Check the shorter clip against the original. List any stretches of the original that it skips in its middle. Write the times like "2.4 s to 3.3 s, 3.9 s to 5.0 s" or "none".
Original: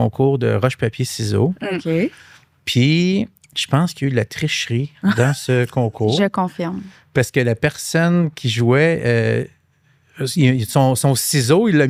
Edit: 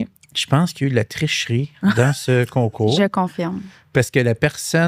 none